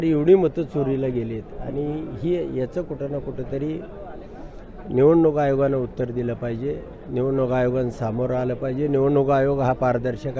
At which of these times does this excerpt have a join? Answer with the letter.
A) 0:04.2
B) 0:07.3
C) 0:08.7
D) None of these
D